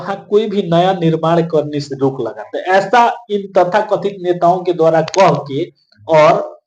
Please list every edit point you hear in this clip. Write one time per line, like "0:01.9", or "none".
none